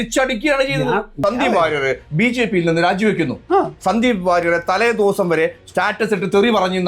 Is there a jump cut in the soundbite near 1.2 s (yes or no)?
yes